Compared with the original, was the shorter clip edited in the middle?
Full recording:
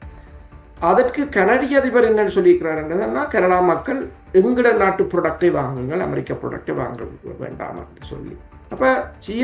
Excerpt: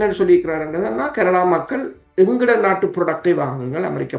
no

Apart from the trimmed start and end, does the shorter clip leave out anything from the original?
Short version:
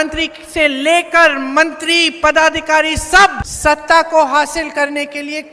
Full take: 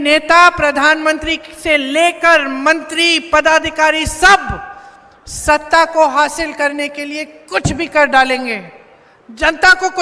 yes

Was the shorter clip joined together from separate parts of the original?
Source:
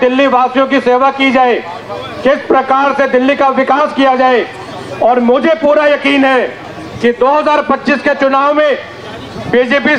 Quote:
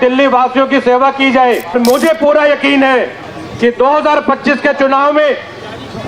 yes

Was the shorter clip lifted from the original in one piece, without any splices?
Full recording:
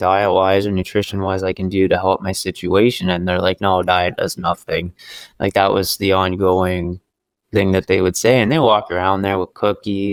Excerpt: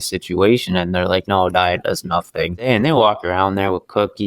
no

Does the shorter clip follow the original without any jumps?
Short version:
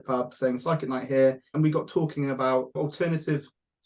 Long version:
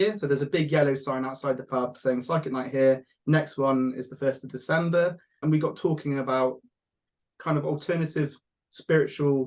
no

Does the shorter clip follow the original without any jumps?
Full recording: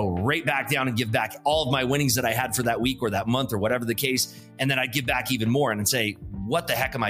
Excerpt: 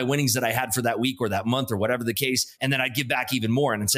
no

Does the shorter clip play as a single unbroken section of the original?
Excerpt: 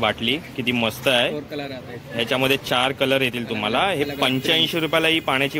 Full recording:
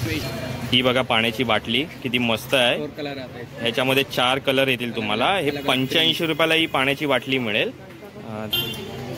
yes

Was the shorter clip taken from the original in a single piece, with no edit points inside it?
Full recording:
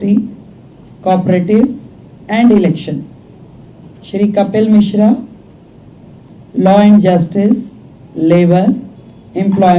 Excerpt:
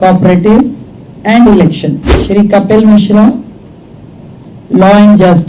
no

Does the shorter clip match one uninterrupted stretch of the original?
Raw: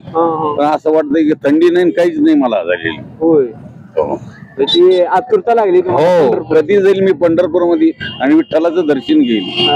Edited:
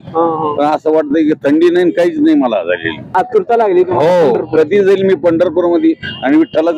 no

